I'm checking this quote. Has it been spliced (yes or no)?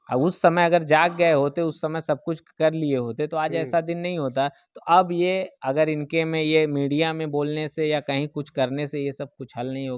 no